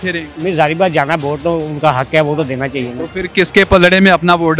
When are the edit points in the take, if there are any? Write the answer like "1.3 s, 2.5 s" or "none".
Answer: none